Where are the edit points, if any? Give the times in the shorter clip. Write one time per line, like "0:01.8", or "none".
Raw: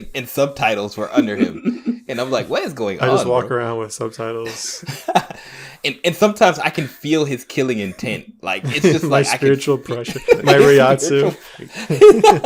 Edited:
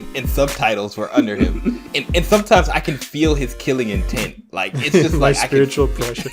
0:01.8

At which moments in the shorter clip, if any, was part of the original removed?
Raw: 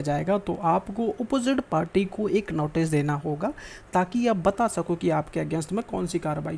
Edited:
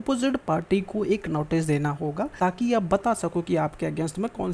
0:02.3

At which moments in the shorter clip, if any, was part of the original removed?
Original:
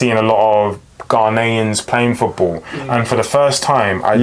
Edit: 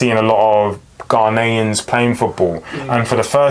none

